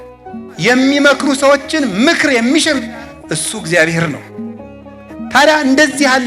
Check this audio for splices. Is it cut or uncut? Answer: uncut